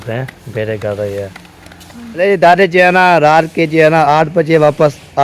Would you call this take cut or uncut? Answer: cut